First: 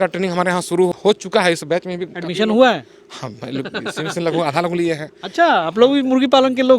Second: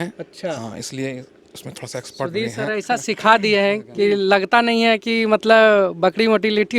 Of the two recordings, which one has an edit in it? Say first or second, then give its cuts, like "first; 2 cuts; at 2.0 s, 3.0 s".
first; 1 cut; at 0.9 s